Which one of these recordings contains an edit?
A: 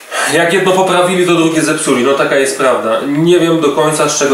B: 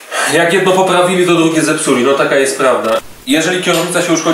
B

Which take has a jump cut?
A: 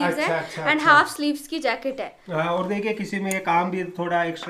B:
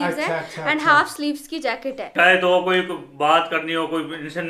B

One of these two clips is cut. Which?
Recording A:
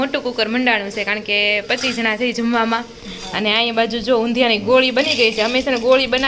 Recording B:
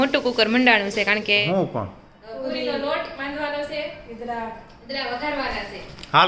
B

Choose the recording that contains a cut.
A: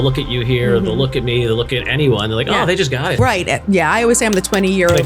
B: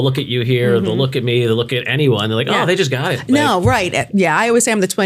A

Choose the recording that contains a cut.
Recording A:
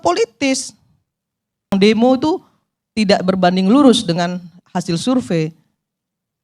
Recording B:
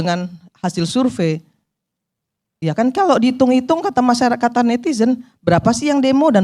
A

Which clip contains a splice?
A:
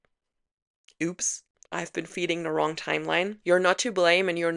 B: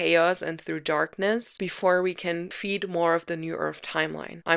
B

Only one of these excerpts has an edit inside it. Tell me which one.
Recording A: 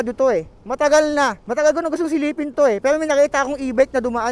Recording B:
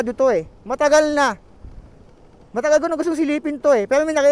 A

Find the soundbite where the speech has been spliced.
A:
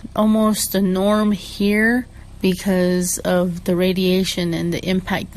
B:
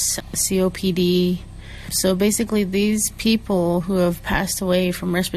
A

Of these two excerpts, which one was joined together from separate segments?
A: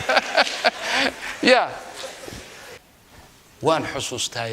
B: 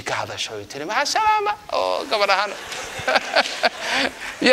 A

